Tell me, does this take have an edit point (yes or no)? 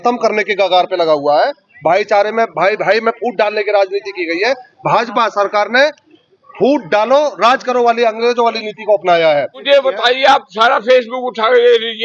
yes